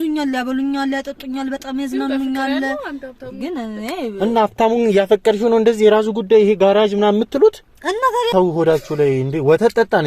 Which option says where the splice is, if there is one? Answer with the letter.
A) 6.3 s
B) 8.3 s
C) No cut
B